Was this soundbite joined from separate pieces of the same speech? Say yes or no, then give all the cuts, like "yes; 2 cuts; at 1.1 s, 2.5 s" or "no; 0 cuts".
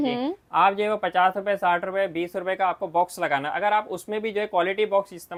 no; 0 cuts